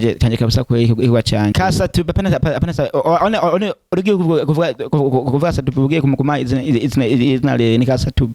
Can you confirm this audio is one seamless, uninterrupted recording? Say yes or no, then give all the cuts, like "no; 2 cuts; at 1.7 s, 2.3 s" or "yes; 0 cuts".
no; 1 cut; at 1.5 s